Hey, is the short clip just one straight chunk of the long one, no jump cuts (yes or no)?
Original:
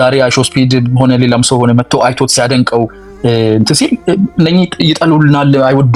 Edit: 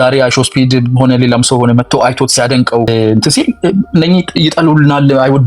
no